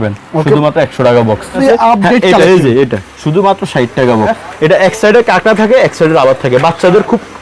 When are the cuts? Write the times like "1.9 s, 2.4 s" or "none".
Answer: 1.6 s, 4.4 s

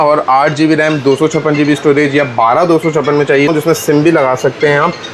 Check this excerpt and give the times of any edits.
3.5 s

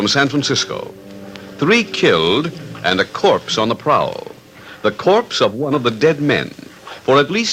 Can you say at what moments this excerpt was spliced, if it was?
3.5 s

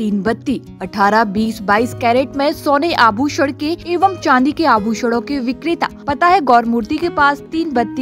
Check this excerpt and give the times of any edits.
3.8 s, 6.0 s

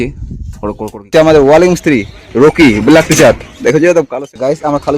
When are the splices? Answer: 1.1 s, 4.1 s

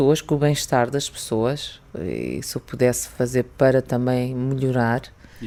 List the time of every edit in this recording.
none

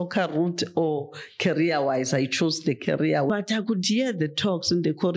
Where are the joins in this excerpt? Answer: 3.3 s

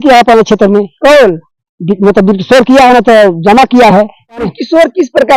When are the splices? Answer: none

